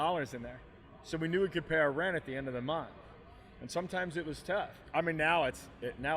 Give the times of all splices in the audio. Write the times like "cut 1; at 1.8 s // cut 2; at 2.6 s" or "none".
cut 1; at 4.8 s